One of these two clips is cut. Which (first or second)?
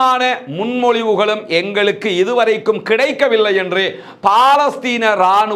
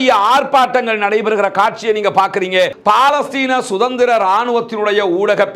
second